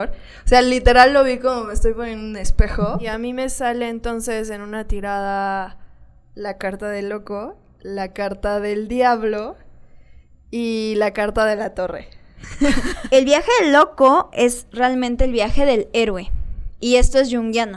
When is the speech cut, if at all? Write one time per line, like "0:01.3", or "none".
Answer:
0:03.0
0:13.0